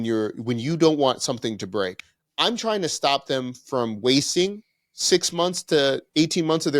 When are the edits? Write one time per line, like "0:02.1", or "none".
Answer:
0:02.0

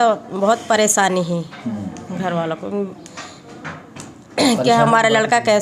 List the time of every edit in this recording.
none

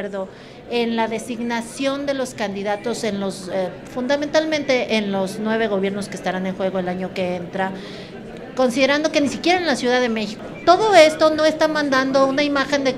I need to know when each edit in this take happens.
0:10.3

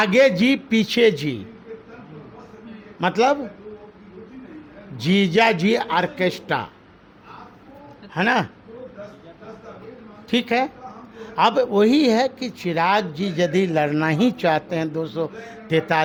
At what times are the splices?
none

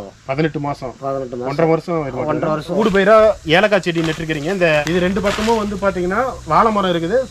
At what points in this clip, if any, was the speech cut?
0:02.8
0:04.8

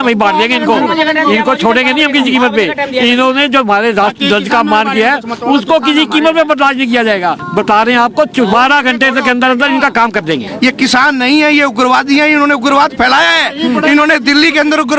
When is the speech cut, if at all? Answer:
0:07.4
0:10.4

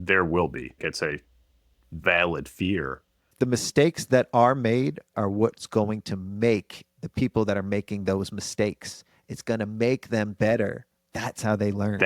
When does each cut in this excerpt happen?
0:00.8
0:03.3
0:05.1

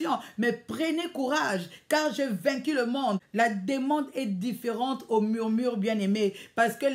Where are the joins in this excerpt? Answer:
0:03.2

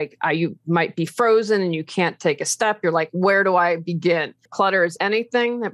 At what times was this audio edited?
0:04.8

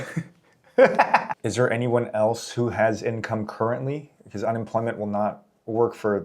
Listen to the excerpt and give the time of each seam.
0:01.4

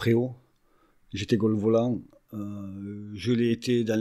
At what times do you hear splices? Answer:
0:02.1

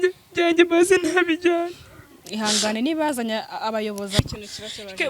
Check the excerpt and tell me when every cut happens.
0:04.2

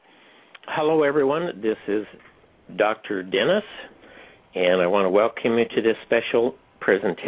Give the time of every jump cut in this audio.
none

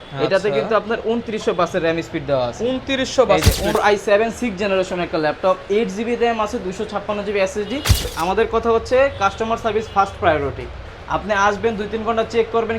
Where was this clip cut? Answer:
0:03.8
0:08.1

